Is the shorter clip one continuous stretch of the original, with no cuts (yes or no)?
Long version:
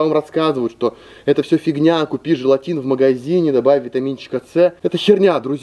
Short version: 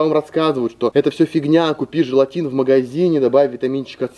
no